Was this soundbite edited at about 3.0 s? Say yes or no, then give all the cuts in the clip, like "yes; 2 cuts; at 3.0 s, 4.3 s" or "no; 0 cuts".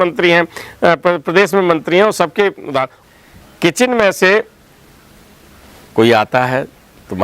yes; 1 cut; at 3.0 s